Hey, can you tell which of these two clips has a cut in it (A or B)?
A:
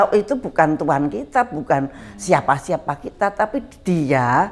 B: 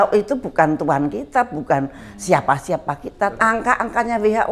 B